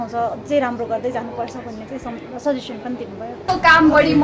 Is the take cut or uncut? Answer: uncut